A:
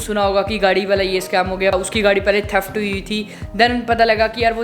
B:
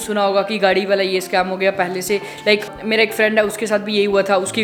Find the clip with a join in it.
A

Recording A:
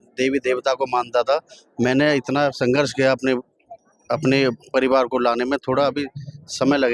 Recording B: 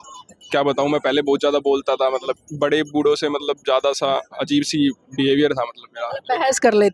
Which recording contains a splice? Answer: B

